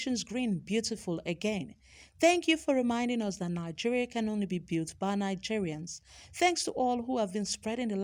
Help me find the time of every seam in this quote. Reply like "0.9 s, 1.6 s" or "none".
none